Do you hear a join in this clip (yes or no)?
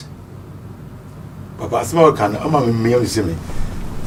no